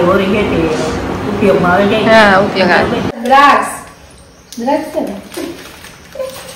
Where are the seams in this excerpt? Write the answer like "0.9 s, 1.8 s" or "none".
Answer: 3.2 s